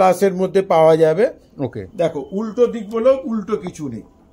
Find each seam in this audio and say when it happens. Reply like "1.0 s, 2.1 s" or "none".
none